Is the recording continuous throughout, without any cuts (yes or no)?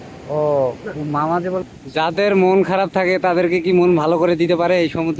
no